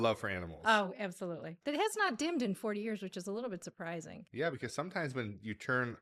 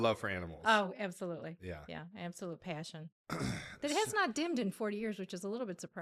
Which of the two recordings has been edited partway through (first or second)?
first